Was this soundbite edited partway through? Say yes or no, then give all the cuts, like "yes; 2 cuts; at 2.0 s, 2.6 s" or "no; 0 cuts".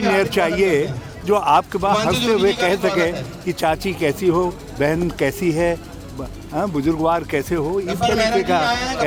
no; 0 cuts